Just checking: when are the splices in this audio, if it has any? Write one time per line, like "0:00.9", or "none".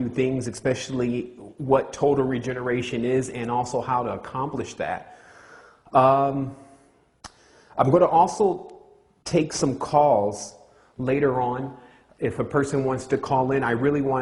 0:10.0